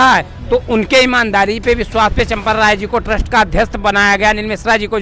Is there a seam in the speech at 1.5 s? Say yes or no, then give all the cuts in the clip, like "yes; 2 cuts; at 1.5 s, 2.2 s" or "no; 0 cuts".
no; 0 cuts